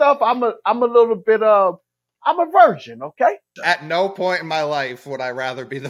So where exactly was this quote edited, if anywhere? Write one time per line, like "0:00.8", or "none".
0:03.5